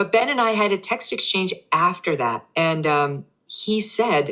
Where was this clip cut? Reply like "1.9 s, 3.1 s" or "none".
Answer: none